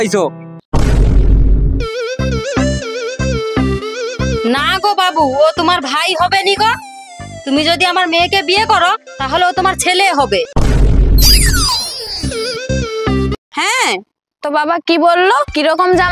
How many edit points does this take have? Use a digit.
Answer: 1